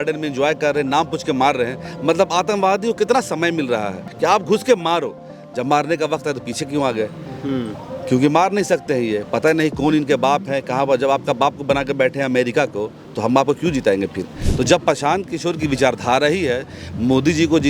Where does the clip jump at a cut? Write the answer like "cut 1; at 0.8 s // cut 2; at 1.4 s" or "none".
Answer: cut 1; at 4.0 s // cut 2; at 14.4 s